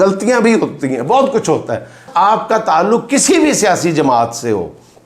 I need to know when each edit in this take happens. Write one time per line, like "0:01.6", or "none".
0:02.1